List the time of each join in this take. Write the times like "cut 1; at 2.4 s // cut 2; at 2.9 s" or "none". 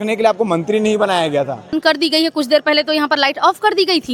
cut 1; at 1.8 s